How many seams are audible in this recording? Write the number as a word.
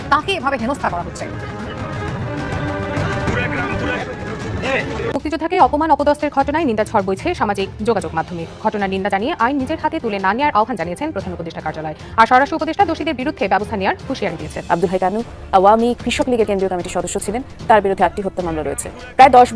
two